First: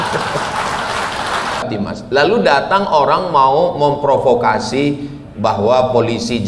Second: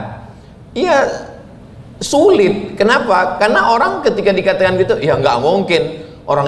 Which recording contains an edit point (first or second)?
first